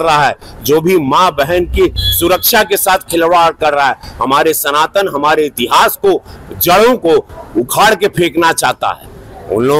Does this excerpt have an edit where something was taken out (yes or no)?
no